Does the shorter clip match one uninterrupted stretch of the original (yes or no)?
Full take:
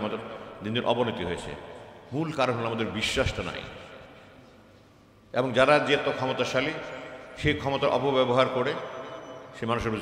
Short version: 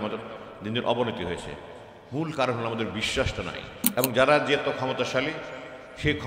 no